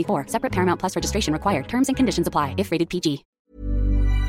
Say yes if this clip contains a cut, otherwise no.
yes